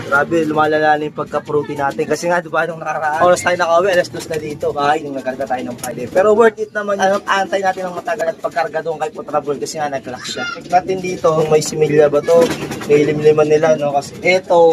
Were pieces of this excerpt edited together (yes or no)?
no